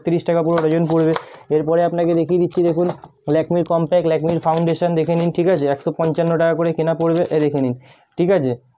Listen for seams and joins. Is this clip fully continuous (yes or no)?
yes